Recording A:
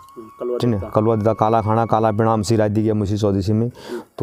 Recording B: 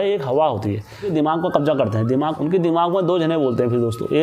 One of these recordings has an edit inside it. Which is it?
B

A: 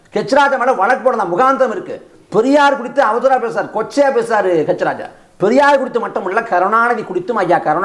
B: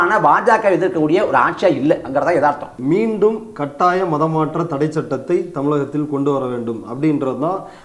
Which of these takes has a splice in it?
B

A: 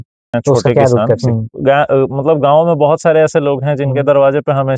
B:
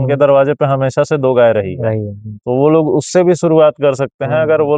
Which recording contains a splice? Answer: A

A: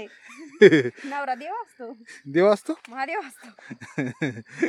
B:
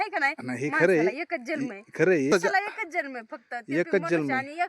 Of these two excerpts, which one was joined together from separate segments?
B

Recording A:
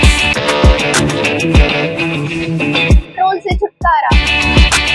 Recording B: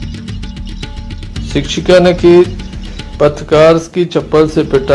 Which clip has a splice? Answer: B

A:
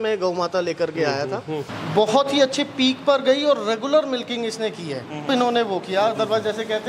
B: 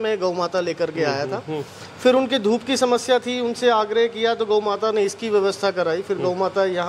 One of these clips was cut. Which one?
A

